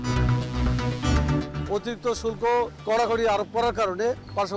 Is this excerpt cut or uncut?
cut